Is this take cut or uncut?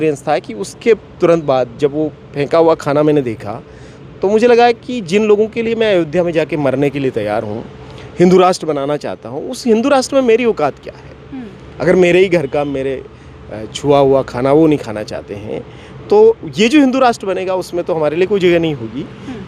uncut